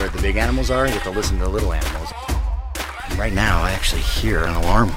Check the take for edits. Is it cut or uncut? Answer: uncut